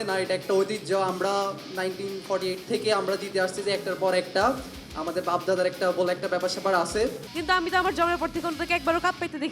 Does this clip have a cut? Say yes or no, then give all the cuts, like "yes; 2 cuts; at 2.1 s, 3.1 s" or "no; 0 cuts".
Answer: yes; 1 cut; at 7.3 s